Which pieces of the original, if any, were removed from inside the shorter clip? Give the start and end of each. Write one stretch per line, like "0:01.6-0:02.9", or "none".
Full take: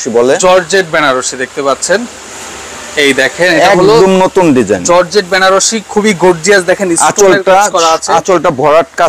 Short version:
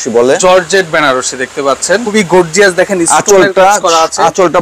0:02.1-0:06.0